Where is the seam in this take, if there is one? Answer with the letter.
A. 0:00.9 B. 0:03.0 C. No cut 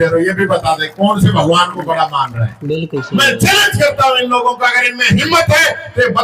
B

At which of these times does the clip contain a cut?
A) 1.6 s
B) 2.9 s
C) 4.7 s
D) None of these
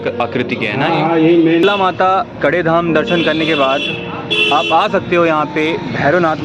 A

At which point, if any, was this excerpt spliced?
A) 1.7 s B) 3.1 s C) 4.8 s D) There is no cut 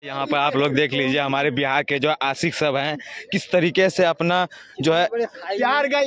B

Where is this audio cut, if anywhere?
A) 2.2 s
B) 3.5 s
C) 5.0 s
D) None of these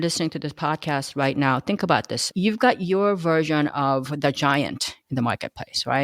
A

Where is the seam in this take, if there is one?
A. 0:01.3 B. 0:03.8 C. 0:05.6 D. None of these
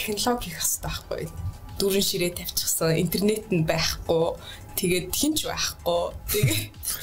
A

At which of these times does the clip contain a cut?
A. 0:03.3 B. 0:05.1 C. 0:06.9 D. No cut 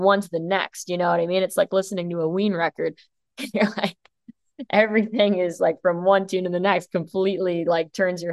D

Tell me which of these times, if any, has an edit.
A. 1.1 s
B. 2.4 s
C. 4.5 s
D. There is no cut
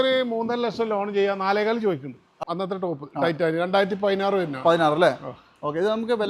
B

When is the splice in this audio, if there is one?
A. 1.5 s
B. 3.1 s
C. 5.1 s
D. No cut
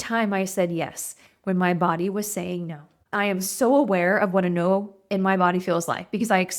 B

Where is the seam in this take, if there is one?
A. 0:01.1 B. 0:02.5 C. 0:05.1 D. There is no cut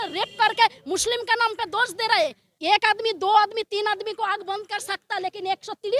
B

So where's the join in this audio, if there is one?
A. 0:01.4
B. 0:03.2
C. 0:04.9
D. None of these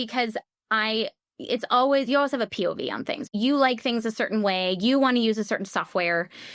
B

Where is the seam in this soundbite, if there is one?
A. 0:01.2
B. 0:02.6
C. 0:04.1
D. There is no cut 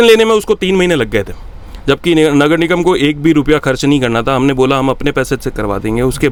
D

